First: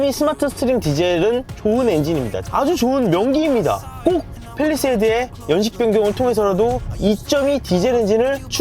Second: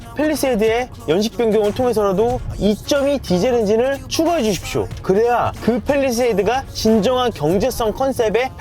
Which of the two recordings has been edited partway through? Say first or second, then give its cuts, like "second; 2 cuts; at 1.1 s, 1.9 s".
first; 2 cuts; at 1.5 s, 2.4 s